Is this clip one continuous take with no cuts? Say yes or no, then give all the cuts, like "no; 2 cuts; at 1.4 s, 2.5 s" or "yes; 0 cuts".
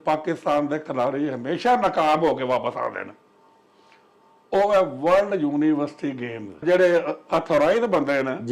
no; 1 cut; at 6.6 s